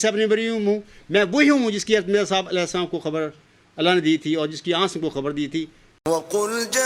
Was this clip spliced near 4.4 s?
no; 1 cut; at 5.9 s

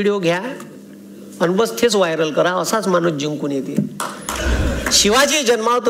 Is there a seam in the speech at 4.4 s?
yes; 1 cut; at 4.4 s

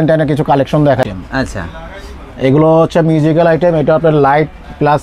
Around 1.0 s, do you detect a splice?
yes; 1 cut; at 1.0 s

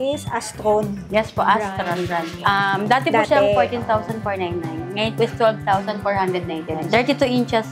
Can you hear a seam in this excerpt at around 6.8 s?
yes; 1 cut; at 6.8 s

